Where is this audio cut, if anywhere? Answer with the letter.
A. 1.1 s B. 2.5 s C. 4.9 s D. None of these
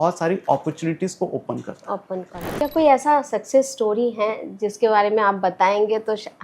B